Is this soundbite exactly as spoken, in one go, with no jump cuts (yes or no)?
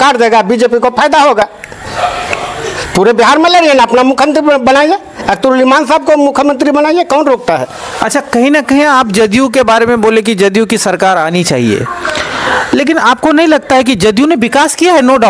yes